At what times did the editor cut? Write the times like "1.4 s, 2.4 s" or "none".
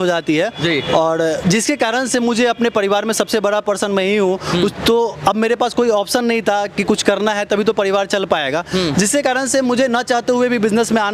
none